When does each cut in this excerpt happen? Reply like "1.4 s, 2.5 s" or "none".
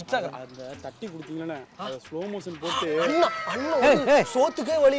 none